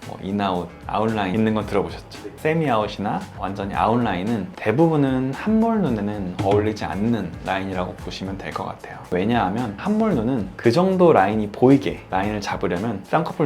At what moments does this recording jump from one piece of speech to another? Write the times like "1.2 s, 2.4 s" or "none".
2.3 s, 9.7 s